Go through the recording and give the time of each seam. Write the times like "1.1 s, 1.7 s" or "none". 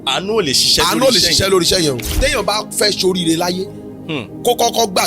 2.1 s